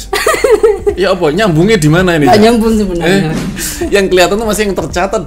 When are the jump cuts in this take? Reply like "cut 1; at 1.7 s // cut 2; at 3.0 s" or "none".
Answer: cut 1; at 3.6 s